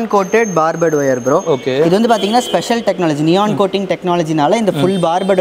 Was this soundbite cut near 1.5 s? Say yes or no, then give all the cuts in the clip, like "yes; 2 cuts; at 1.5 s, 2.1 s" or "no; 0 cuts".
no; 0 cuts